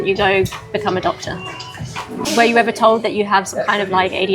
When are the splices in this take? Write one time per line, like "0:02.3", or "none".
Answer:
0:02.3